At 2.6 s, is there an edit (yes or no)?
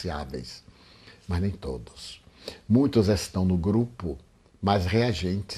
no